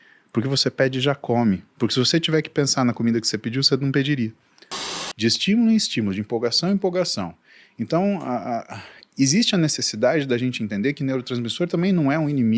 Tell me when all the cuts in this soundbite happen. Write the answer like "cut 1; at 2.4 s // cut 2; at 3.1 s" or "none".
cut 1; at 4.9 s